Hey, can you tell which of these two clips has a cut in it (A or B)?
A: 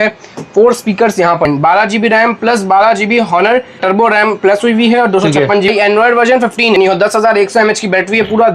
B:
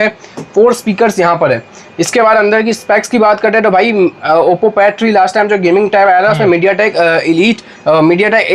A